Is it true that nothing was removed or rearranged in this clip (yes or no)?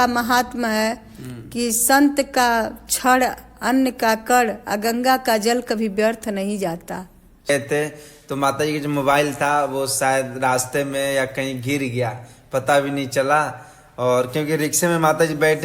no